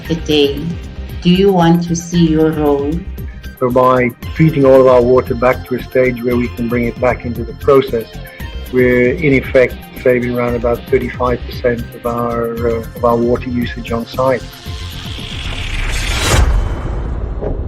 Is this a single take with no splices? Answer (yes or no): no